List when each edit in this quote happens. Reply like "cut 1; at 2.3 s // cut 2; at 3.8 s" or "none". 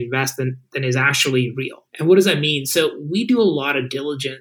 cut 1; at 1.8 s